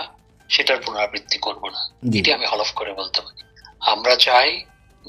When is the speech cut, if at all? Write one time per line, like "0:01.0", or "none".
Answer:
0:03.4